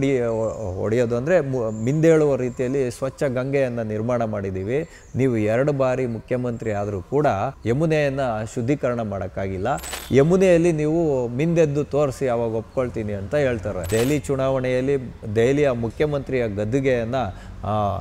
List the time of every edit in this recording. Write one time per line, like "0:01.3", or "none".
0:13.9